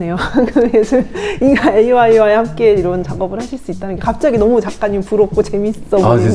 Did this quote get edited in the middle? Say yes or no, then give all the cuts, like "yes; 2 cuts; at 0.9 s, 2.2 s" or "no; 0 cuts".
no; 0 cuts